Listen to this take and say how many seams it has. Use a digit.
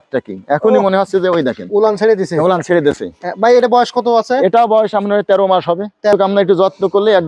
1